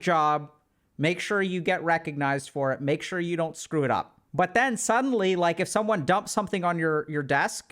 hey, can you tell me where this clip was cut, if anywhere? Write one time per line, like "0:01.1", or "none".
0:04.2